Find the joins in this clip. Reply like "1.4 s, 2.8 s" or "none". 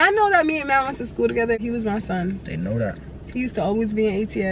1.6 s

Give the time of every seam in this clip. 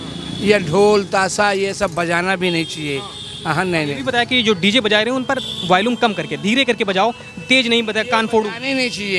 none

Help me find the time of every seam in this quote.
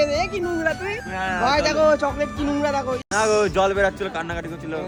none

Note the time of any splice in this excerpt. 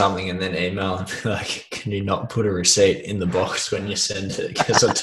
none

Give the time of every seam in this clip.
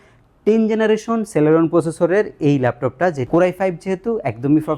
3.2 s

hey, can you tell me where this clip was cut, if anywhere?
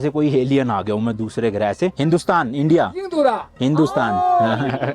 1.9 s

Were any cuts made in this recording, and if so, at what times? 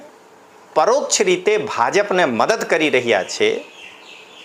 none

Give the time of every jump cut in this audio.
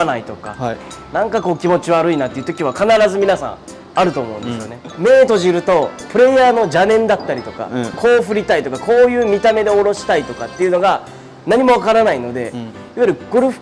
4.8 s

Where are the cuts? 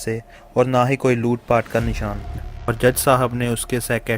2.3 s

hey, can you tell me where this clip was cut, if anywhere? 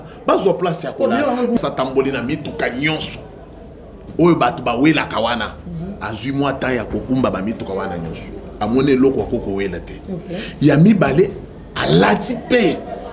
1.6 s

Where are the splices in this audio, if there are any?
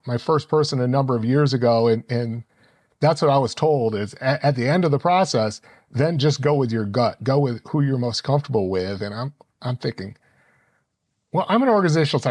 none

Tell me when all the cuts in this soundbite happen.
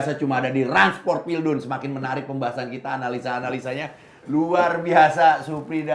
none

